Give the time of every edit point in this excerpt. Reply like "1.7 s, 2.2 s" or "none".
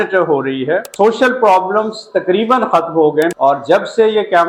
0.9 s, 3.3 s

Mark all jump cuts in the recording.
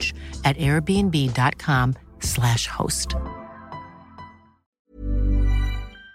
4.7 s

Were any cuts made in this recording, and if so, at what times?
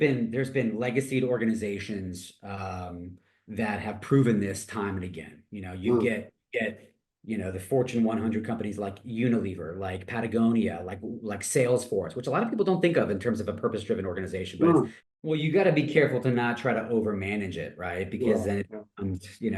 15.0 s

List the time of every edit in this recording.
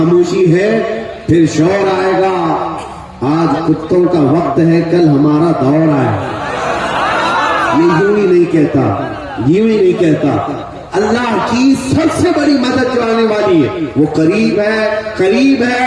none

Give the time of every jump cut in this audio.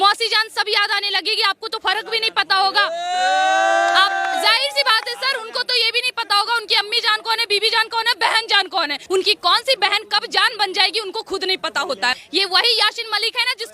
9.0 s, 12.2 s

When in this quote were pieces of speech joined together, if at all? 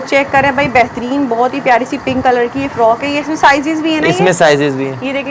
none

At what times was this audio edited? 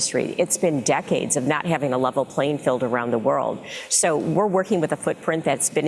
none

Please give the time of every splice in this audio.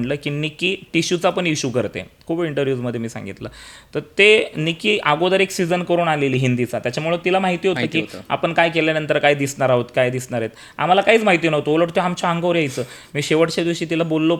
none

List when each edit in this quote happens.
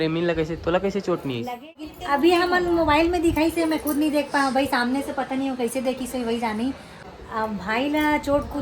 1.9 s, 6.9 s

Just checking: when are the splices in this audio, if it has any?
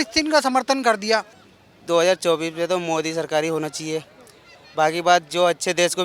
1.4 s

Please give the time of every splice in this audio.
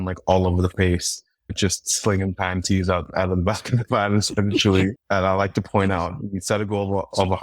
5.0 s

